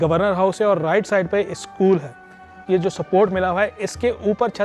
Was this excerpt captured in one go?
no; 1 cut; at 2.6 s

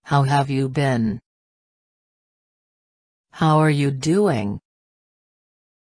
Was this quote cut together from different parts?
no; 0 cuts

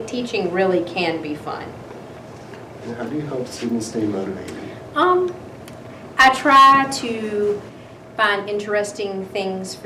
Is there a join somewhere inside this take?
no; 0 cuts

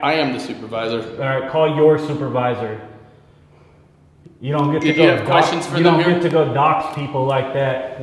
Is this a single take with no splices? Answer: yes; 0 cuts

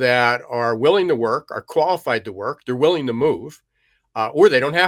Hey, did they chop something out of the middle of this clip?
no; 0 cuts

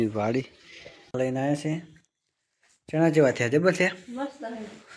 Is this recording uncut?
no; 1 cut; at 1.1 s

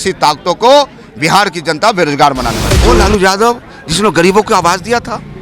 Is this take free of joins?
no; 1 cut; at 2.7 s

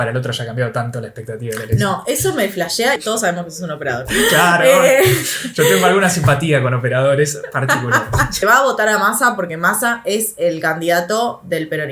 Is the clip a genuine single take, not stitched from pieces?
no; 2 cuts; at 3.0 s, 8.4 s

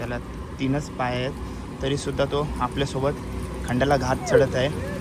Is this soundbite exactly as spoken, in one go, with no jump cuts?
yes; 0 cuts

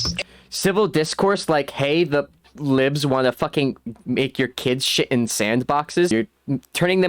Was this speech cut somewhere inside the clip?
yes; 1 cut; at 6.1 s

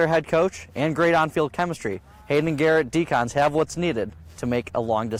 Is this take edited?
no; 0 cuts

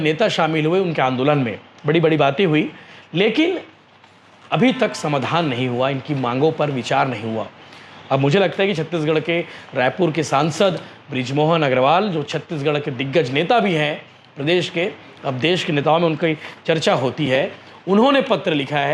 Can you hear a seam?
no; 0 cuts

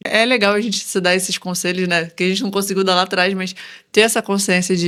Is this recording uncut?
yes; 0 cuts

